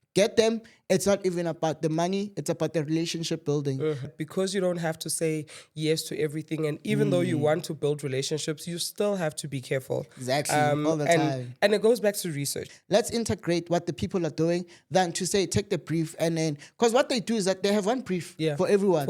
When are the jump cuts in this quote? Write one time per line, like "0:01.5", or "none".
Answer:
0:04.1
0:12.7